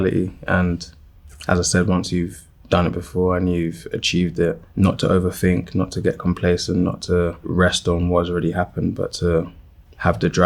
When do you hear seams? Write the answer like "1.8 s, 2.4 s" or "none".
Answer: none

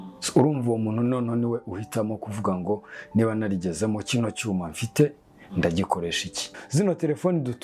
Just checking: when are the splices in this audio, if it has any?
6.5 s

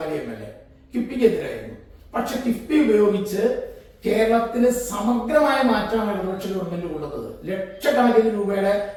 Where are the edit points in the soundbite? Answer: none

